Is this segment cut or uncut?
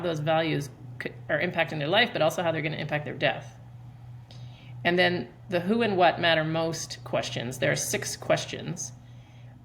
uncut